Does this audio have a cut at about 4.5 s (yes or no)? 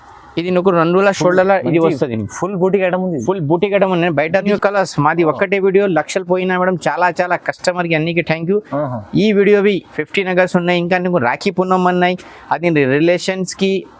yes